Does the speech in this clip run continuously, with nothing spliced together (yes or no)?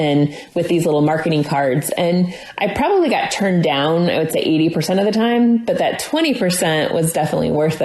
yes